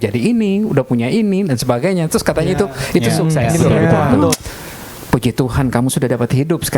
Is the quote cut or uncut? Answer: cut